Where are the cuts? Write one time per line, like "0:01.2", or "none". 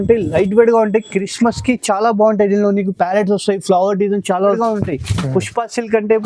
0:04.6